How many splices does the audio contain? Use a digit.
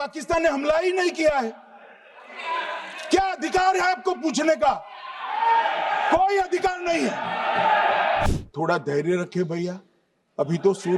1